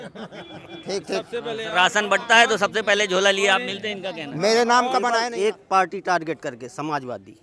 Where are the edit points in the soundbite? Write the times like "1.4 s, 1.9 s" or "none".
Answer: 5.1 s